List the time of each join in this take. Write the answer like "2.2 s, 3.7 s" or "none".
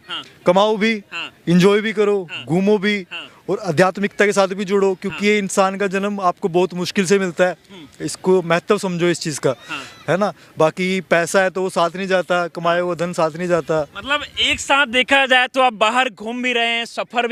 none